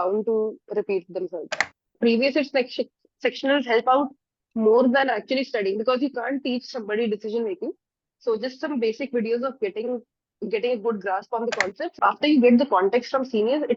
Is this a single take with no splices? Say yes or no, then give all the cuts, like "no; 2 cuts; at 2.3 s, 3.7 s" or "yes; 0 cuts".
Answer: no; 2 cuts; at 1.9 s, 11.9 s